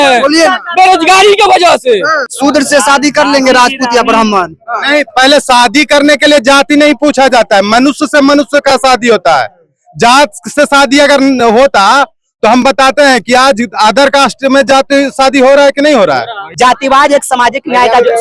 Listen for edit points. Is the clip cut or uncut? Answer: cut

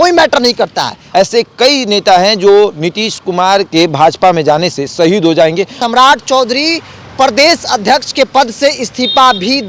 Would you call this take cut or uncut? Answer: cut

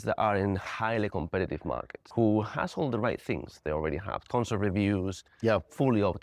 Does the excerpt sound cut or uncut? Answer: cut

